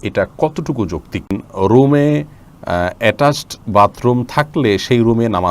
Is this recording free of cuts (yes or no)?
no